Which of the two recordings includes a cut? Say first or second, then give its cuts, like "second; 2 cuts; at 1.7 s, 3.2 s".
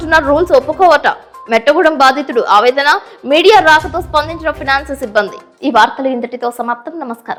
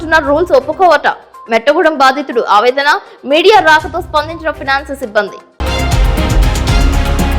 second; 1 cut; at 5.4 s